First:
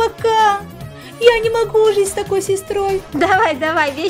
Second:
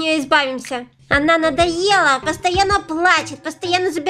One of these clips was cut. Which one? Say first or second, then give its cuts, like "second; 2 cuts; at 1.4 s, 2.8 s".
first; 1 cut; at 3.1 s